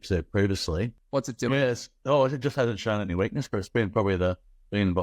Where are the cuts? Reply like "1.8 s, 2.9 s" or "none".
1.0 s